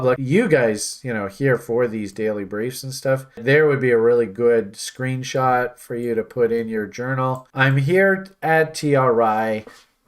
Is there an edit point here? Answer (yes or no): yes